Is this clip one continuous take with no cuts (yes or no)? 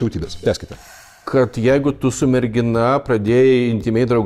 no